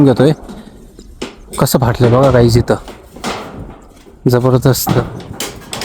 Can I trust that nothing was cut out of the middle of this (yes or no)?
yes